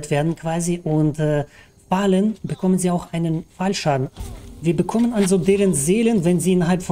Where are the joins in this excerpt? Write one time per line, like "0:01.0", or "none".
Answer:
0:04.1